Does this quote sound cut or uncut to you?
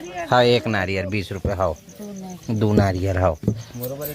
uncut